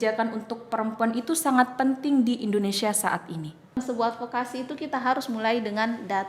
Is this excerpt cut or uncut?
cut